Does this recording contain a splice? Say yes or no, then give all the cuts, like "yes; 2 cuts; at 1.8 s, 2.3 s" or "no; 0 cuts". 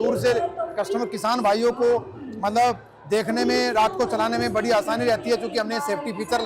no; 0 cuts